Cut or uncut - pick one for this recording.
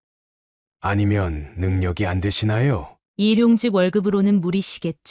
cut